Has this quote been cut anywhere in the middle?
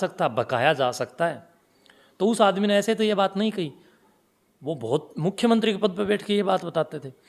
no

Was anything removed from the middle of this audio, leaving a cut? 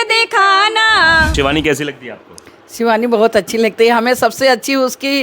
yes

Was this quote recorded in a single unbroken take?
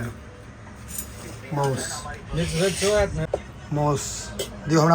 no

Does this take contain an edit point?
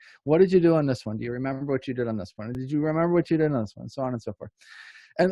yes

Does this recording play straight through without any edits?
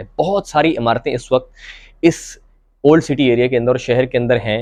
yes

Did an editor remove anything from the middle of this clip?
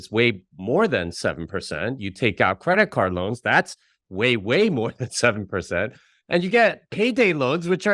no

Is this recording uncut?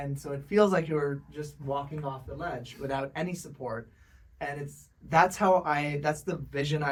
yes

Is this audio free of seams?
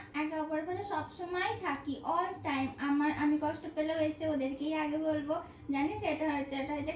yes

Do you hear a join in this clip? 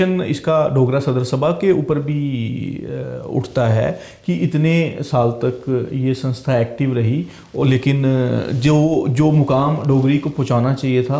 no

